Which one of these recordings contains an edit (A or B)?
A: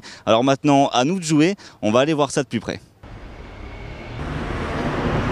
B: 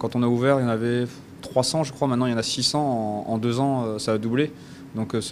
A